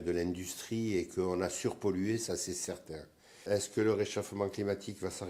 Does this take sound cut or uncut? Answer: cut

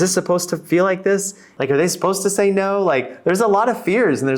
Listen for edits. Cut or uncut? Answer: cut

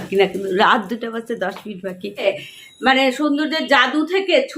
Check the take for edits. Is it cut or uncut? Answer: cut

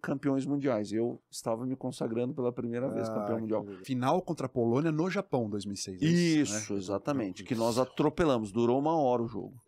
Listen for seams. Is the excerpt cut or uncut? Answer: cut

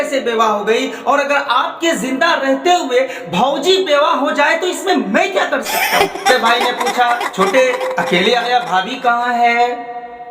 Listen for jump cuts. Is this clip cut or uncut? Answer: cut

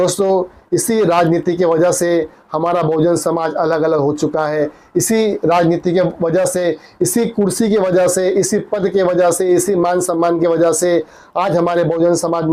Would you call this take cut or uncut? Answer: uncut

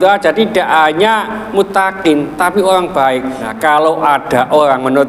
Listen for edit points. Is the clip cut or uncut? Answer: cut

